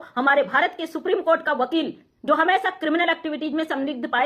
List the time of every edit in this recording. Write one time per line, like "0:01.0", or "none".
none